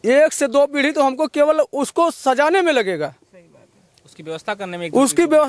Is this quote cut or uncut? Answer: uncut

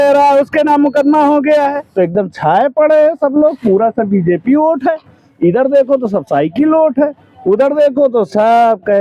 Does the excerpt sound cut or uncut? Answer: cut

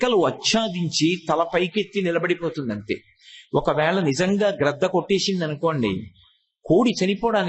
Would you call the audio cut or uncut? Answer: uncut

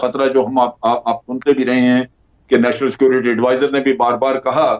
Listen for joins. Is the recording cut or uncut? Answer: uncut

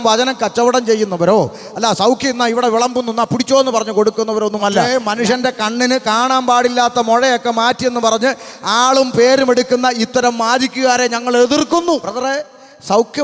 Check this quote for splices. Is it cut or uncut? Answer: cut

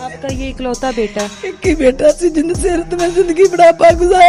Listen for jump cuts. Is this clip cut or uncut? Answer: uncut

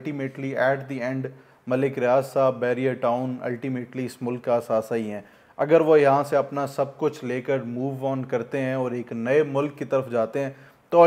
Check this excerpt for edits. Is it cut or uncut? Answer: uncut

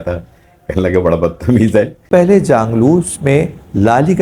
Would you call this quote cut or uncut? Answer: cut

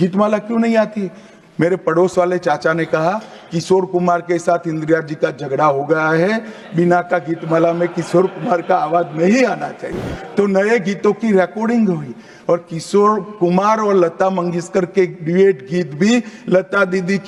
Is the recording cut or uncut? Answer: uncut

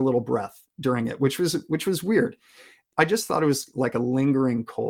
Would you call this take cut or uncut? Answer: cut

